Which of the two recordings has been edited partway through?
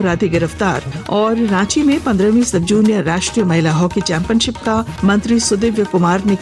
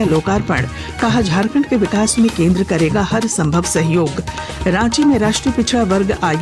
first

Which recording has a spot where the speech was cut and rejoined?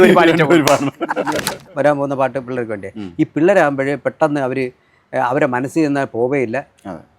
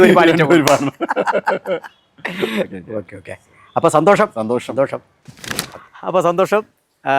first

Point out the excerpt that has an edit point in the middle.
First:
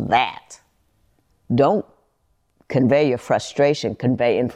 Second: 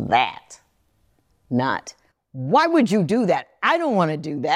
first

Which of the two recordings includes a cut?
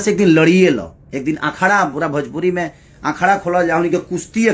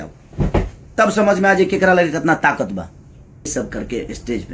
second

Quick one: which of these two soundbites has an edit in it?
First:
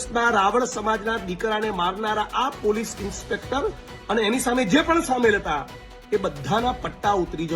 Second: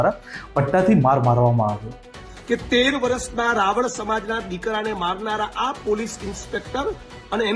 second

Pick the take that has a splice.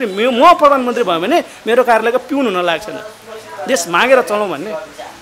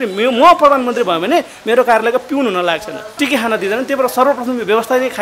second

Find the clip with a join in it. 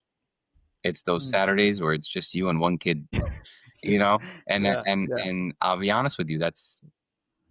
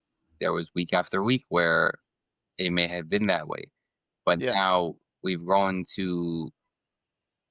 first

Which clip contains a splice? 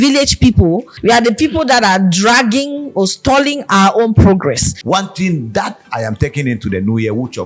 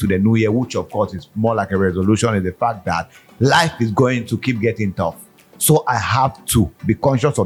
first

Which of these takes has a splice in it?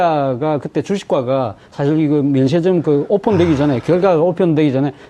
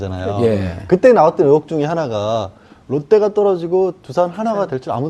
first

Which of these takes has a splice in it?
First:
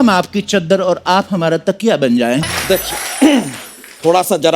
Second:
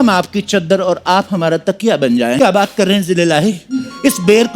second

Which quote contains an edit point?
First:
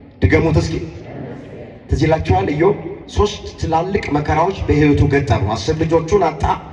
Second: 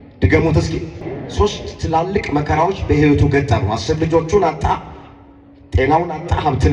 second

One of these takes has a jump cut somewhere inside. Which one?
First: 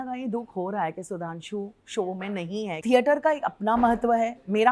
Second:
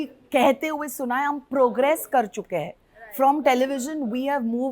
first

